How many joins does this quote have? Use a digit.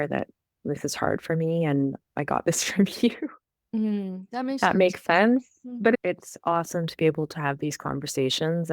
1